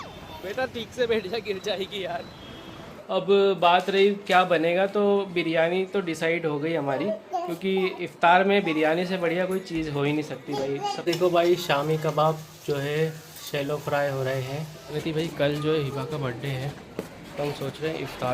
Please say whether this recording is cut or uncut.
cut